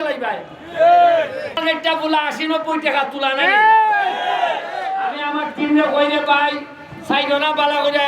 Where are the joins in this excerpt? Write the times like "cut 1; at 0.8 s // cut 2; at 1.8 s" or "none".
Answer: cut 1; at 1.6 s